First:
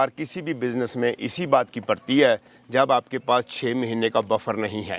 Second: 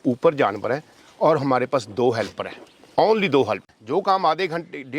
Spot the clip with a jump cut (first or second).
second